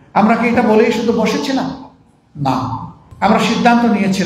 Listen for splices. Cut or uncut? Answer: cut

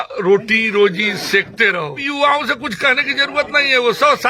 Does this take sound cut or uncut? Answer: cut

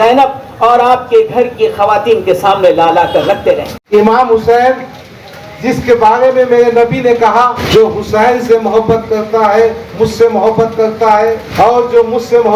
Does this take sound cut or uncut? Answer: cut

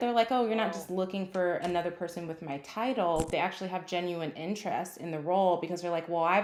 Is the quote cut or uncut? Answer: uncut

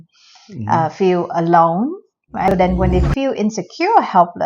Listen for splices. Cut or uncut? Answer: cut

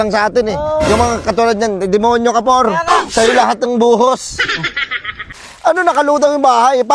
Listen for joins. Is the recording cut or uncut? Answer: cut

